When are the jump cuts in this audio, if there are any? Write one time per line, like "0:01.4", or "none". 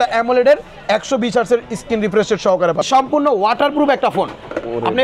0:02.9